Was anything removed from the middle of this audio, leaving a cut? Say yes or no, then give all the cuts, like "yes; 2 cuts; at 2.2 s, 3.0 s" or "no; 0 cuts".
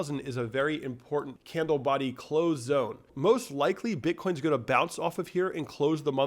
yes; 2 cuts; at 1.4 s, 3.1 s